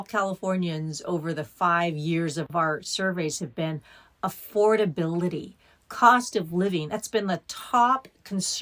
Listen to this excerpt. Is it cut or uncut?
uncut